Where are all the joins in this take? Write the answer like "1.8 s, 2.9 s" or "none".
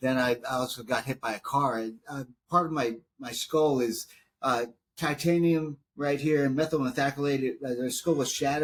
none